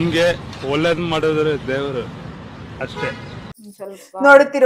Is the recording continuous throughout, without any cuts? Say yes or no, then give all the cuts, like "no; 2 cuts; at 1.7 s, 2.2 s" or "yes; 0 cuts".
no; 1 cut; at 3.5 s